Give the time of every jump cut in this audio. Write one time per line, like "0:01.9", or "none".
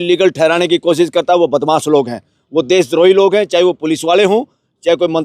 none